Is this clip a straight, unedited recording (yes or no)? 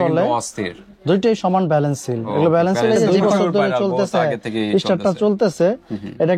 no